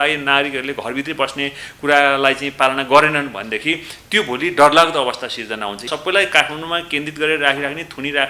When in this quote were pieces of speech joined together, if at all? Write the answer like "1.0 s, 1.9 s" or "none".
5.9 s